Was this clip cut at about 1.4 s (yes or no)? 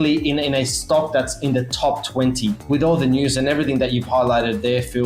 no